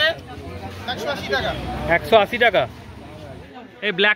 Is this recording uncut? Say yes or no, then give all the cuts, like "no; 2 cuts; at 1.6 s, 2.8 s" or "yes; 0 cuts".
yes; 0 cuts